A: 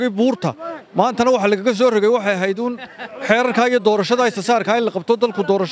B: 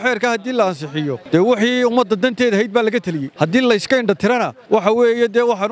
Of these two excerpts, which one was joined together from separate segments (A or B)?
B